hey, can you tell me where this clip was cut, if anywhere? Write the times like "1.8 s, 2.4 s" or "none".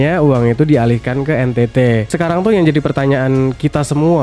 2.1 s